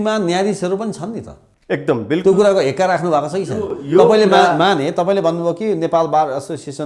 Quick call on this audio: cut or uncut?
uncut